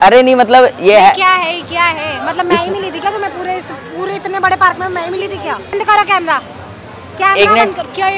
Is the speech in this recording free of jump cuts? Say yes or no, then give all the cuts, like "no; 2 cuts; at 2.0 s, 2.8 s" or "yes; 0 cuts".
no; 1 cut; at 5.7 s